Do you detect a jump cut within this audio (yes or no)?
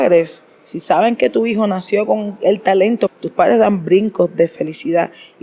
yes